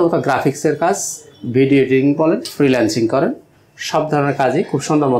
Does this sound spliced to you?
no; 0 cuts

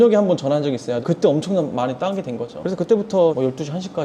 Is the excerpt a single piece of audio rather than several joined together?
no; 2 cuts; at 1.0 s, 2.6 s

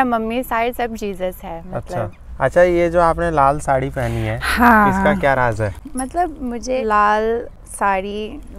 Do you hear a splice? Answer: yes; 4 cuts; at 2.2 s, 5.8 s, 6.8 s, 7.6 s

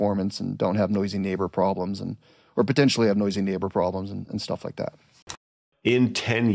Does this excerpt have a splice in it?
yes; 1 cut; at 5.2 s

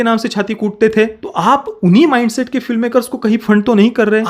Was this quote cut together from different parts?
yes; 1 cut; at 1.2 s

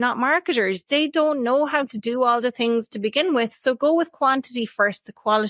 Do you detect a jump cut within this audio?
no; 0 cuts

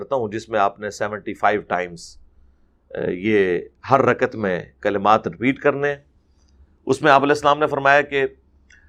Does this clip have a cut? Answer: no; 0 cuts

